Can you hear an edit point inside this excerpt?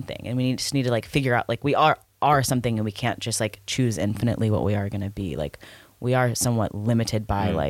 no; 0 cuts

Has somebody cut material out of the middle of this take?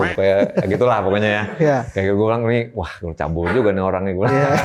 no; 0 cuts

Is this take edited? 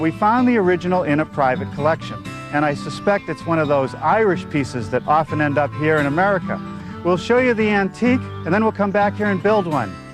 no; 0 cuts

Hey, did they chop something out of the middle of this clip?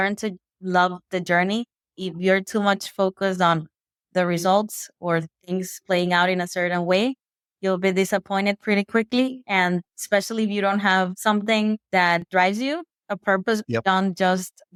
no; 0 cuts

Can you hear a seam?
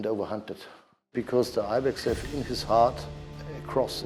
yes; 1 cut; at 1.1 s

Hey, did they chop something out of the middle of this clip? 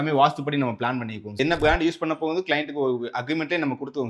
yes; 1 cut; at 1.3 s

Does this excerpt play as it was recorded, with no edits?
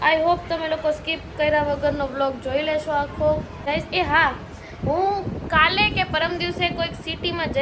no; 1 cut; at 3.7 s

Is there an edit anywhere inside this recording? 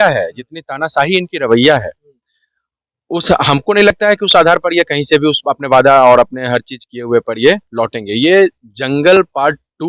no; 0 cuts

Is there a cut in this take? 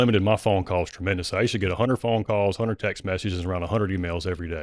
no; 0 cuts

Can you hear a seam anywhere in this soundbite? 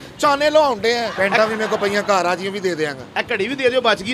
yes; 1 cut; at 1.1 s

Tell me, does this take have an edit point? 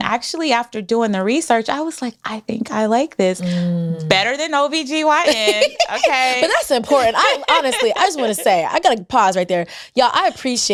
no; 0 cuts

